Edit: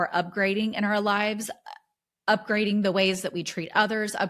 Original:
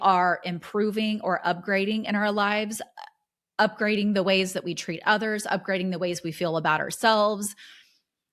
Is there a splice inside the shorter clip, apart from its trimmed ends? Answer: no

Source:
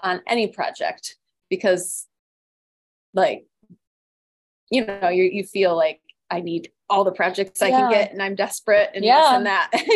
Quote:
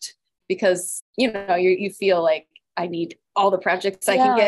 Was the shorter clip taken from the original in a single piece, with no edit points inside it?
no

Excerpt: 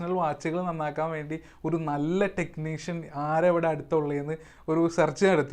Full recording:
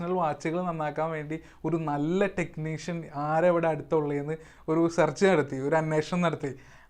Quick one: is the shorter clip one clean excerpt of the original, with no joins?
yes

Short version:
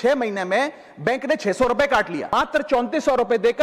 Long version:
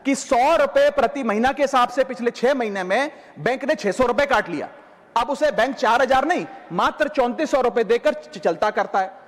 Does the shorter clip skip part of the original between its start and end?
yes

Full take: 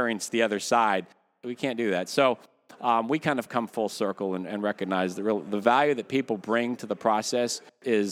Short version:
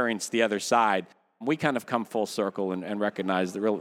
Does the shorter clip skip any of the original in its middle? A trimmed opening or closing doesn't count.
yes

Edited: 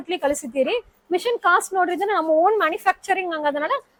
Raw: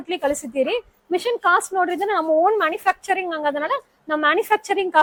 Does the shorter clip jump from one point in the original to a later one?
no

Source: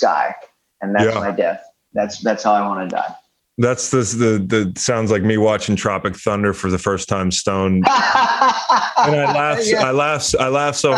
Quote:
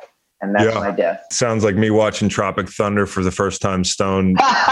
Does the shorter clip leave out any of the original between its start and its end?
yes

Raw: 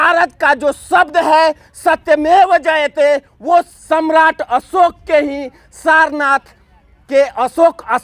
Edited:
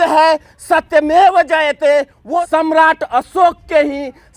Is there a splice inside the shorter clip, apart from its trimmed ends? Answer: yes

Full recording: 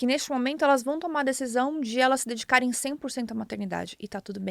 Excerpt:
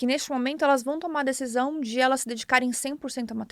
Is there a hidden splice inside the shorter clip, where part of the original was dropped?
no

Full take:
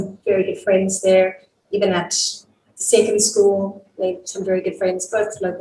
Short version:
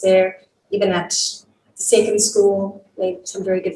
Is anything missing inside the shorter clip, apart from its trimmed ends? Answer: no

